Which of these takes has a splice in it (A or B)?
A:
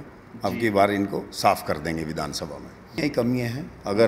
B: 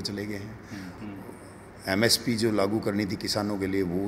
A